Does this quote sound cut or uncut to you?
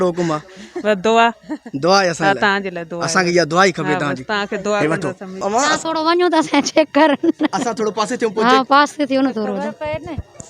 cut